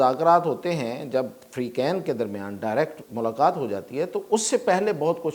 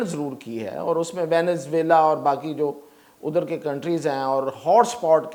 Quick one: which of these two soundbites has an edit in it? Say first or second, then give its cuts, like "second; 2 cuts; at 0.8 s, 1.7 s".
first; 1 cut; at 3.0 s